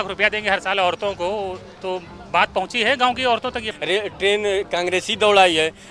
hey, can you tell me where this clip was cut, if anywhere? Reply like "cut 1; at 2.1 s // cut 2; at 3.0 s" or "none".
cut 1; at 3.6 s